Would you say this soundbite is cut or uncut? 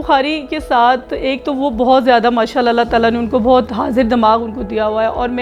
uncut